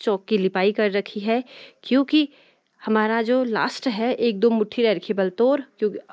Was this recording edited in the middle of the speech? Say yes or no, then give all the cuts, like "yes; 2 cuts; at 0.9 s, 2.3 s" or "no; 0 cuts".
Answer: no; 0 cuts